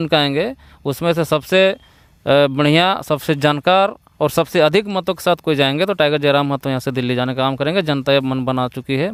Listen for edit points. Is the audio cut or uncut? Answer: uncut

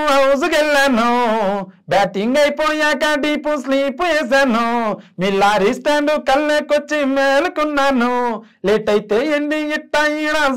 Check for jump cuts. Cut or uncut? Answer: uncut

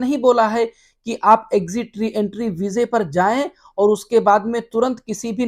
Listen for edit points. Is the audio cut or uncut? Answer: uncut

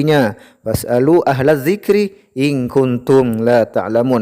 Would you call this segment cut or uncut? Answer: uncut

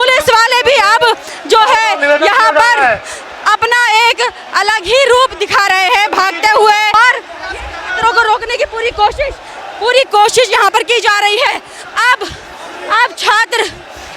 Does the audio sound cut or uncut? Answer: cut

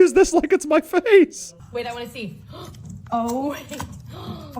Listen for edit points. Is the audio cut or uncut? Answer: cut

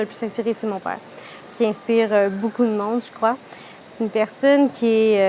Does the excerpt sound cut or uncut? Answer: uncut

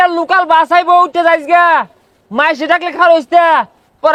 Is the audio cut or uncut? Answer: uncut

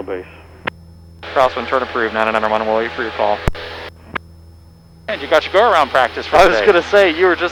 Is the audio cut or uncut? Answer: uncut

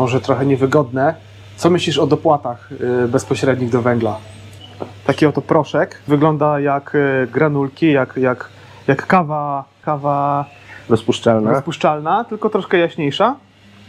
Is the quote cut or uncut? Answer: cut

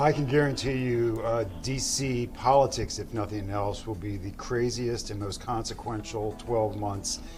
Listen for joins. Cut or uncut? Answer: uncut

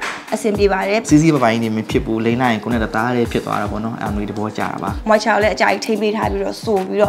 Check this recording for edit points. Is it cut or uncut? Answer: cut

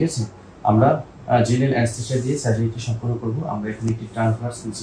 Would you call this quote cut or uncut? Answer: uncut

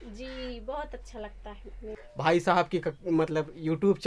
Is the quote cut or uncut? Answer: cut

